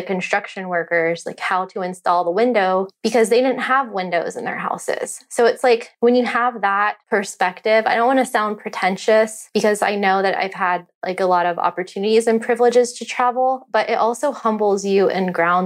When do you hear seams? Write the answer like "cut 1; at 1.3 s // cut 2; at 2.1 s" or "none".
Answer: cut 1; at 7.0 s